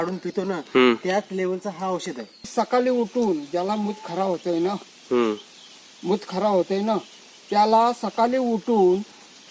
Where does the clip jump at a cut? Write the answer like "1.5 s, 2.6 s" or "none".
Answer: 2.5 s